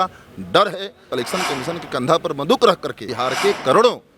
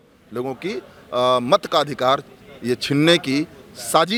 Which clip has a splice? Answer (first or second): first